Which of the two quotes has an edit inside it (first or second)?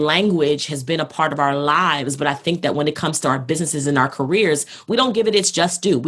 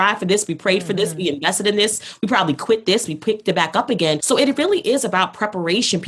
second